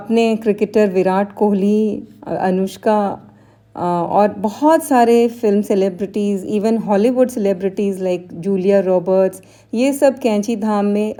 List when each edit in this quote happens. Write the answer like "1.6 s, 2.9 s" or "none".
none